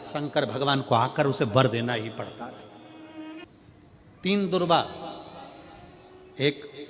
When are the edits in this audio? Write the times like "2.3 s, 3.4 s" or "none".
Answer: 3.4 s